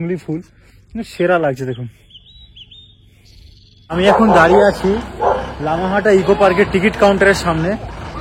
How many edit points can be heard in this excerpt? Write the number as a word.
one